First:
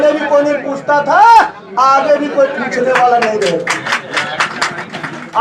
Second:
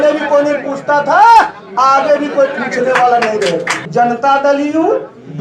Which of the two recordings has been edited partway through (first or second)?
second